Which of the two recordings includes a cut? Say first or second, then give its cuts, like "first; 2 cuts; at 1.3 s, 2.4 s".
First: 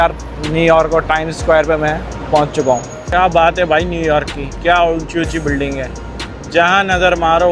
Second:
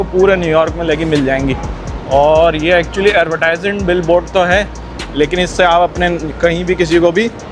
first; 1 cut; at 3.0 s